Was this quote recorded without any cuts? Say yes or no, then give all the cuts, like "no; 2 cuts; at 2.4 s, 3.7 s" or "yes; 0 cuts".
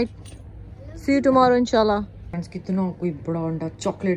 no; 1 cut; at 2.2 s